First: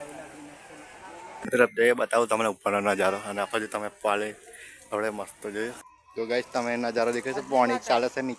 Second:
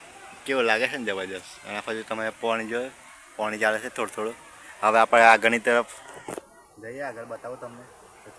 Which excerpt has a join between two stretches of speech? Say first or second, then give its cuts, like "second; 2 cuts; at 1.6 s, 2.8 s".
first; 2 cuts; at 1.3 s, 5.9 s